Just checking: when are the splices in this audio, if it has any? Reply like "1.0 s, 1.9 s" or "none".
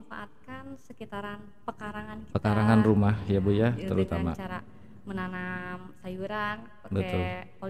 none